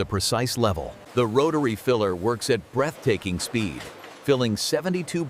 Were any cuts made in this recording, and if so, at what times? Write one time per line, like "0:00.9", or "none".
0:01.0